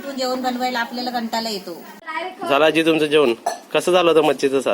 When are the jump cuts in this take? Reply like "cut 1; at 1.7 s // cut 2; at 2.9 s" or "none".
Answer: cut 1; at 2.1 s

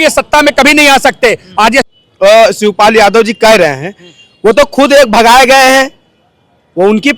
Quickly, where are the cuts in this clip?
cut 1; at 1.9 s

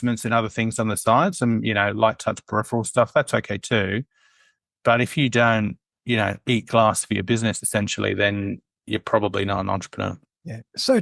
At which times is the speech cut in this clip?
none

